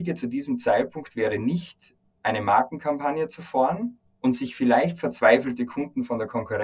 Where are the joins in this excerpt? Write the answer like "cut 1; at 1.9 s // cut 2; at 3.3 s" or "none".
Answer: none